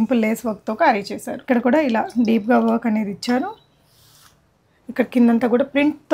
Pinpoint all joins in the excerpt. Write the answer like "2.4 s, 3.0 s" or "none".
1.4 s